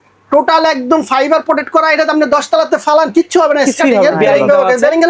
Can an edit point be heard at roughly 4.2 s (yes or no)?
yes